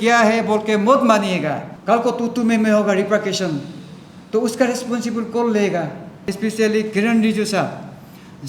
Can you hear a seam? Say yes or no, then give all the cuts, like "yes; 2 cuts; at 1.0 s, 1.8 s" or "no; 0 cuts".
yes; 2 cuts; at 1.7 s, 6.3 s